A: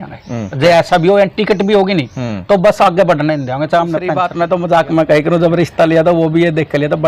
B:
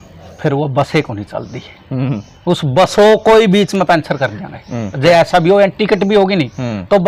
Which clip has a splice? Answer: A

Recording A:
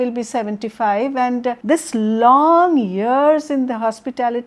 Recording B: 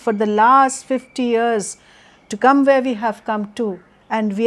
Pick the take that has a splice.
A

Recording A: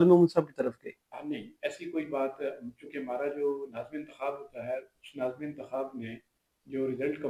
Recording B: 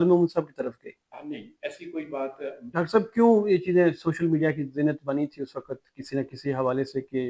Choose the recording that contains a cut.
B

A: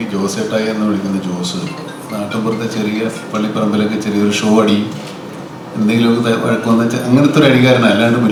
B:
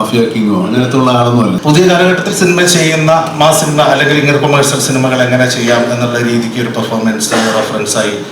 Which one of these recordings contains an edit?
B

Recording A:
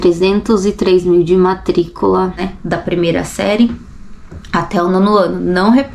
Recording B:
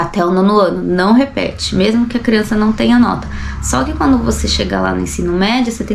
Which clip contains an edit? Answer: A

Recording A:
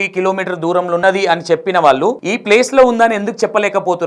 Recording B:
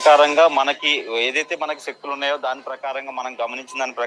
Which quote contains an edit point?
A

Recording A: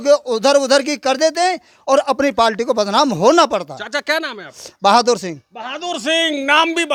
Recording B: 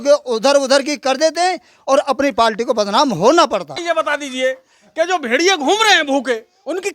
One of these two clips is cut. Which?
B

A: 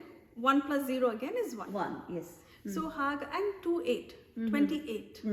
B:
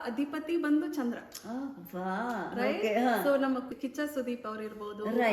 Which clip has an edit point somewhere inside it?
B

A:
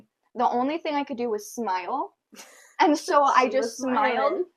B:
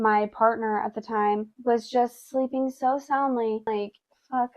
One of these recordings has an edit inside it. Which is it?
B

